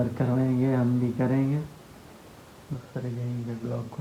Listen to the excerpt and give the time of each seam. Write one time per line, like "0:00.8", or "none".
none